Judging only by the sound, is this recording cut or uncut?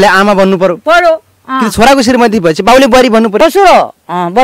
cut